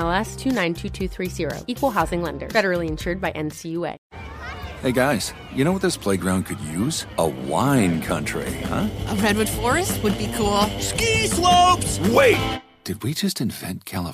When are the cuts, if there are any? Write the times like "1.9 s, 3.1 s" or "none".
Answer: 4.0 s